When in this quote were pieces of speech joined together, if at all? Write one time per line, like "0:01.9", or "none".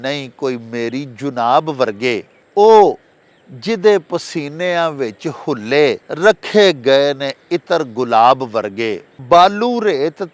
0:02.4
0:06.1
0:09.1